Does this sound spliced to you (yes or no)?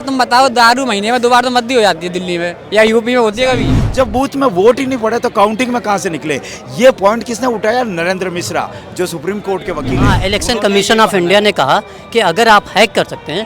yes